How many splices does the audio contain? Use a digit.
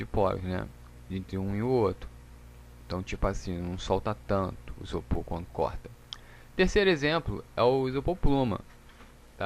0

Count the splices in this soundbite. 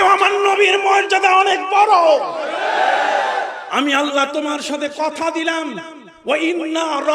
1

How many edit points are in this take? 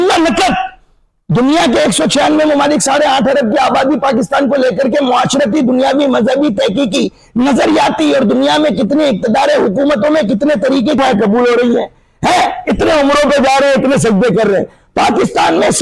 1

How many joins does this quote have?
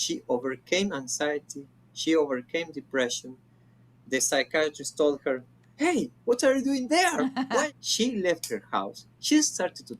1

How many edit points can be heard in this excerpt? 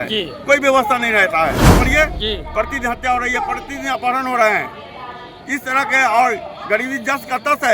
1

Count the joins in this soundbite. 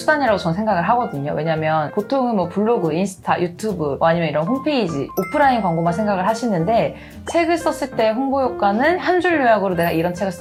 0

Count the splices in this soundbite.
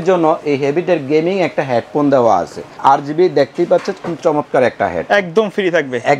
1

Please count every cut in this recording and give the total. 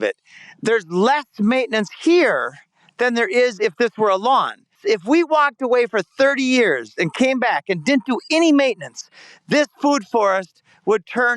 1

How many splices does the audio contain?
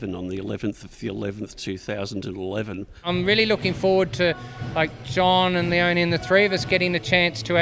1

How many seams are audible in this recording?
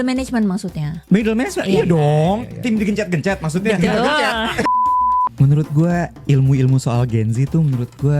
1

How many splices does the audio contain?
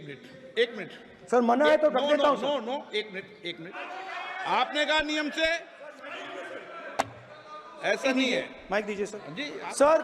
1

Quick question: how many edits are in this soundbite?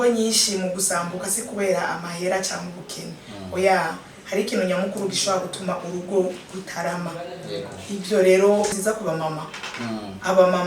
1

